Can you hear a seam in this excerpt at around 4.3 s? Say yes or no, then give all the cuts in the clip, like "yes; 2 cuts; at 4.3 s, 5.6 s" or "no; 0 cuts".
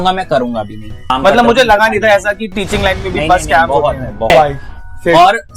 yes; 2 cuts; at 1.1 s, 4.3 s